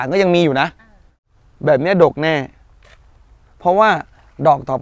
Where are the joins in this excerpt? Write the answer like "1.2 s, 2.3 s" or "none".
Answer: 1.1 s